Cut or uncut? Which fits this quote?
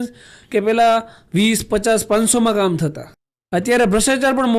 uncut